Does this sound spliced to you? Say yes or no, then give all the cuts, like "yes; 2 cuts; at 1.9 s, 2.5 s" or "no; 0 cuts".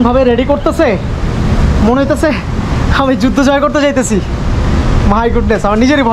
no; 0 cuts